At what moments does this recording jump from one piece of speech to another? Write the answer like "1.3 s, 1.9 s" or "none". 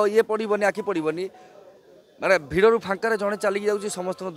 none